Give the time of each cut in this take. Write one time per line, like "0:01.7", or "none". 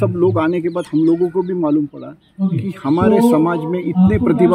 none

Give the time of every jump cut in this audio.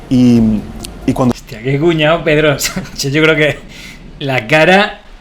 0:04.2

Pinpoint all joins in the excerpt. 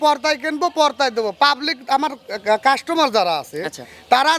none

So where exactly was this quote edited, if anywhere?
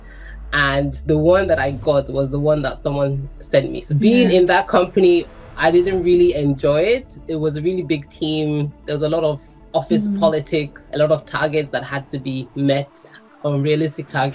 0:03.8
0:10.8

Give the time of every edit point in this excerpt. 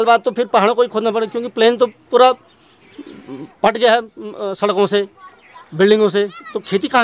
none

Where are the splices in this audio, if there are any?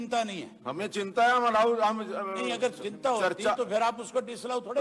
none

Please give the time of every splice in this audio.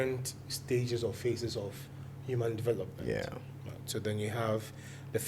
none

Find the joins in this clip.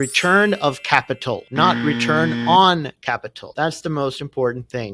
none

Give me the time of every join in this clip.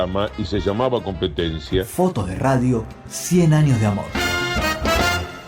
0:01.9
0:04.1

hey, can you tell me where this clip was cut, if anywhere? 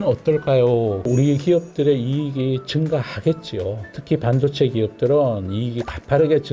0:01.0

